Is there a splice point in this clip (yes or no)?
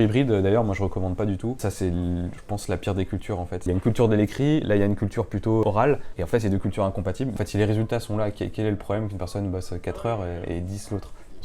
yes